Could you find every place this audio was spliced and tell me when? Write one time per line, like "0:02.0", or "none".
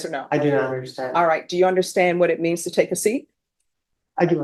none

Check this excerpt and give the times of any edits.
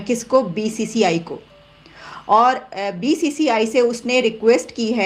none

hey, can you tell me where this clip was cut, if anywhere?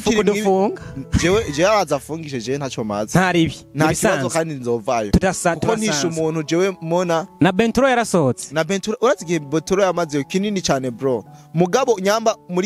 none

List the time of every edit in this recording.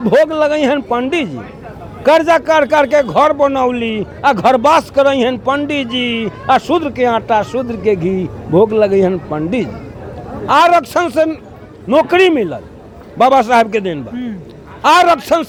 none

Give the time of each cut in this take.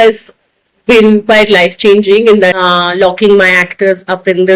0:02.6

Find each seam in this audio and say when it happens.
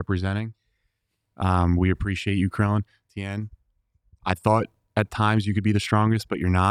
none

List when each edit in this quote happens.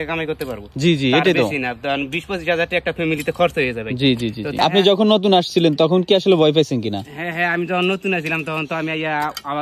0:04.5

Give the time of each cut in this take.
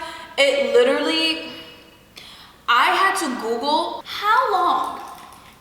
0:04.1

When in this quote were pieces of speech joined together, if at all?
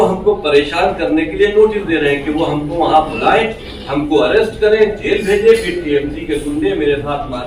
none

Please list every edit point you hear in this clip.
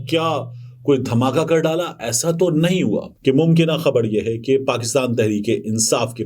0:03.1

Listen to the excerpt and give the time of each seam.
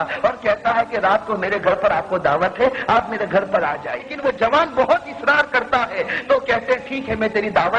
0:04.1

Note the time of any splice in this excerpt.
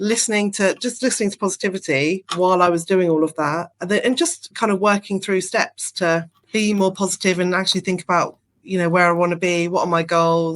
0:03.7
0:06.4

